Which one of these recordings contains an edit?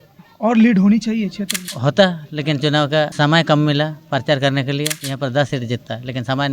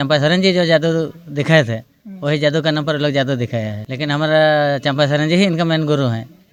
first; 3 cuts; at 1.7 s, 3.1 s, 5.0 s

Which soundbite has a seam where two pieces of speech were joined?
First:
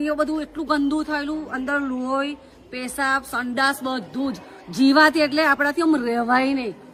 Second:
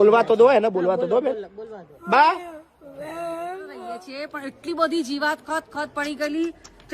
second; 1 cut; at 3.9 s

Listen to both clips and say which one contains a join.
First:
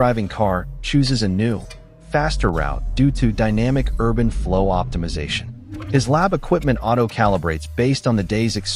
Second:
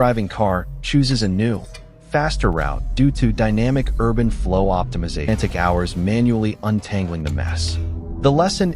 second; 1 cut; at 5.3 s

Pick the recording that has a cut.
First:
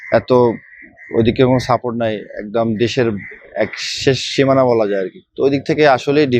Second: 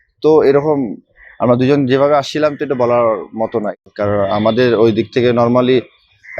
second; 1 cut; at 3.7 s

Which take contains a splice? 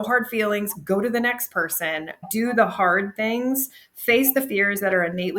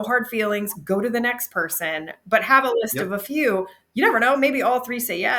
first; 1 cut; at 2.2 s

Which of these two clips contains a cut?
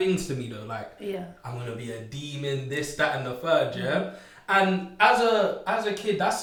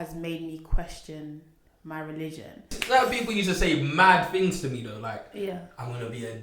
second; 1 cut; at 2.8 s

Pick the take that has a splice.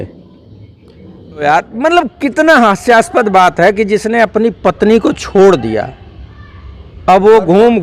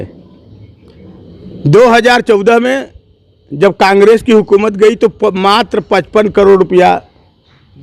first; 1 cut; at 1.4 s

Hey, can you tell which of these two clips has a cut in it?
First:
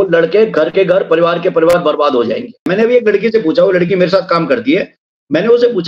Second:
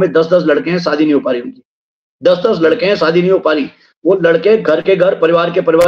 first; 1 cut; at 2.7 s

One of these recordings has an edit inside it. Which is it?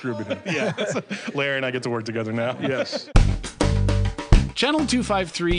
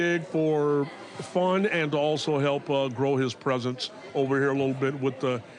first; 1 cut; at 3.0 s

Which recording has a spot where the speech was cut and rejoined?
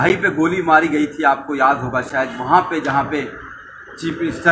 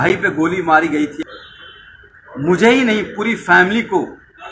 second; 1 cut; at 1.2 s

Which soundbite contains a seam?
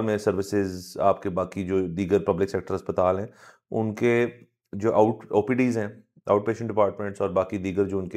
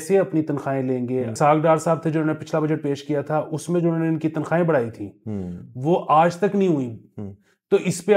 second; 1 cut; at 1.3 s

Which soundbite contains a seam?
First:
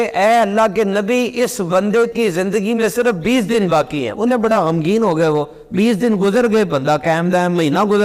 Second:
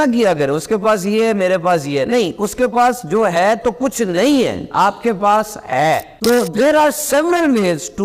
second; 1 cut; at 6.1 s

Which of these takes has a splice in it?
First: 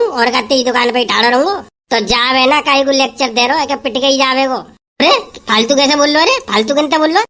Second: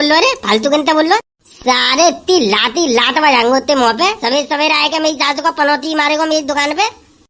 second; 1 cut; at 4.2 s

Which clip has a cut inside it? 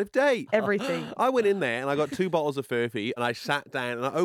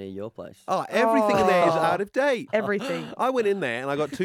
first; 1 cut; at 3.2 s

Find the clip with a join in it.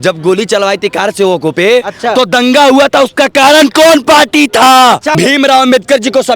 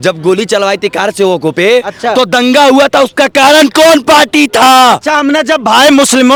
first; 1 cut; at 5.1 s

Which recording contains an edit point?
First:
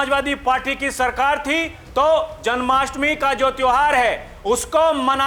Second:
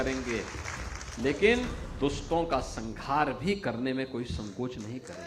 second; 1 cut; at 1.8 s

